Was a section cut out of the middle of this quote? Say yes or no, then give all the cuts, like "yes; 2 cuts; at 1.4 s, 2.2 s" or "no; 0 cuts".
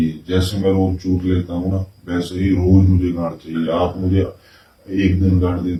no; 0 cuts